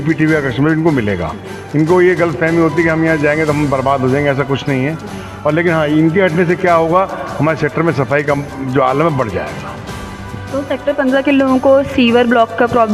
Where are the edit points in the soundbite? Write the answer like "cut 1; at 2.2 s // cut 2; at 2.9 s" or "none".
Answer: none